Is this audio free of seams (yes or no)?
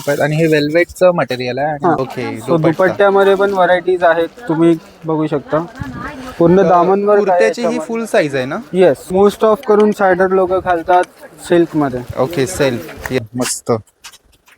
no